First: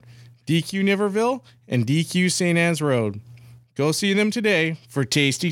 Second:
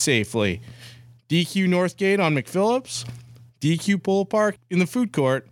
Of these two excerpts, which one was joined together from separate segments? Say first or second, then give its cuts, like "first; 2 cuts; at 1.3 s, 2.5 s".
second; 1 cut; at 4.6 s